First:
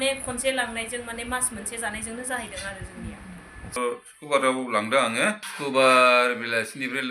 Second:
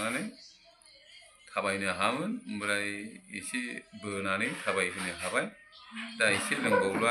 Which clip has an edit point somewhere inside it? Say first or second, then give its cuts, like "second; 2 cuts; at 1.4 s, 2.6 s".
first; 2 cuts; at 3.8 s, 5.5 s